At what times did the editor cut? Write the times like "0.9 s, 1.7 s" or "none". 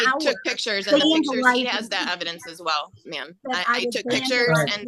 none